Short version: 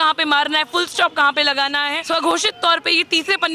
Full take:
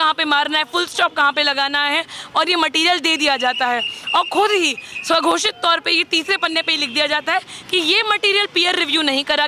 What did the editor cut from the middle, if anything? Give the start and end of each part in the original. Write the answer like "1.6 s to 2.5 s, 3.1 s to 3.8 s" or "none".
1.9 s to 4.9 s